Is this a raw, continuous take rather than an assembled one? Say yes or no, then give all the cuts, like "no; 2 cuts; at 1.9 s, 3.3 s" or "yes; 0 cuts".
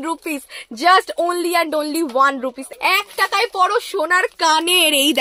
no; 1 cut; at 2.7 s